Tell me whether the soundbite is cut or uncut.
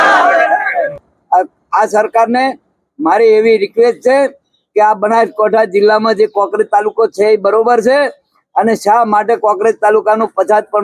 cut